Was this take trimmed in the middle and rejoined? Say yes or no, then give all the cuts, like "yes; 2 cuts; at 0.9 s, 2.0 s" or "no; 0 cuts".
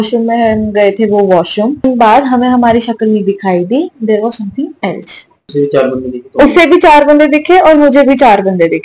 yes; 2 cuts; at 1.9 s, 5.5 s